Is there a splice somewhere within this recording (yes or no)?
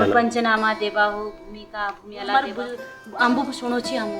yes